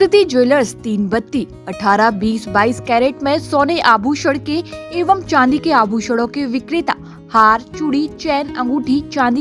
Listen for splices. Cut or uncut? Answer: uncut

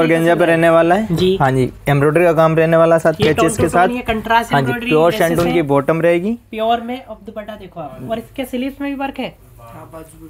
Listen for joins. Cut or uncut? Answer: uncut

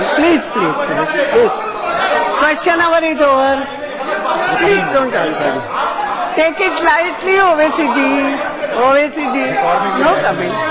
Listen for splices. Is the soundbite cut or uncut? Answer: uncut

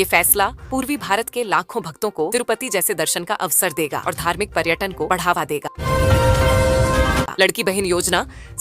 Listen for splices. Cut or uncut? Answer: cut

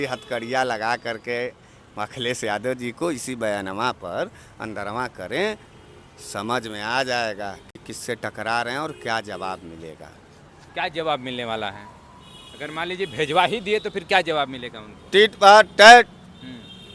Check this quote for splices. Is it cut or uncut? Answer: uncut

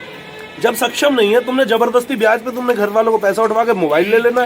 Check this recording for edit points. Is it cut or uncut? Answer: uncut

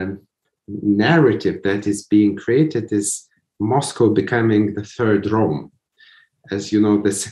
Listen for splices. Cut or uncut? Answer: uncut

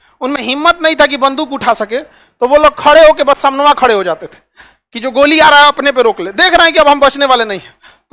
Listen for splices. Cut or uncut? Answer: uncut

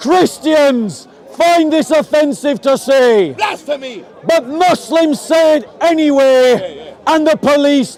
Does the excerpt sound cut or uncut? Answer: uncut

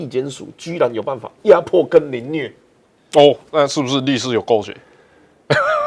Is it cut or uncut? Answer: uncut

